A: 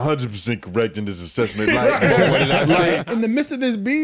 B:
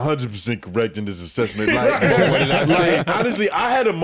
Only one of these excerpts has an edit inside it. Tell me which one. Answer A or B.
A